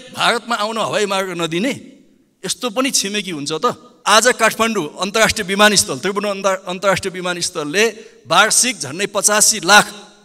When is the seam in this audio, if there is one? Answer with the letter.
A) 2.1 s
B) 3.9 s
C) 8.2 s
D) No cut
B